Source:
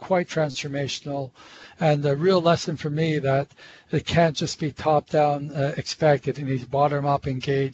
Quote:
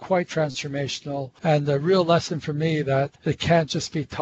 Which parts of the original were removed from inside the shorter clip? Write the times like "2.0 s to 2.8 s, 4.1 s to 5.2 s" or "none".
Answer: 1.3 s to 1.7 s, 3.5 s to 3.8 s